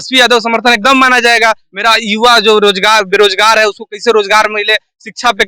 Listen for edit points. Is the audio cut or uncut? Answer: cut